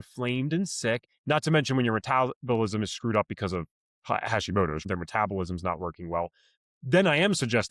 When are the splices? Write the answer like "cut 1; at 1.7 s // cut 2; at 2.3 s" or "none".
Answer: cut 1; at 4.8 s